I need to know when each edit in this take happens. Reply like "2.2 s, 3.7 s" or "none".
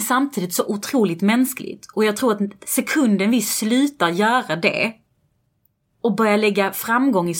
none